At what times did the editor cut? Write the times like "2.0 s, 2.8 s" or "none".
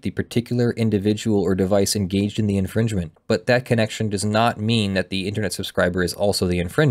3.2 s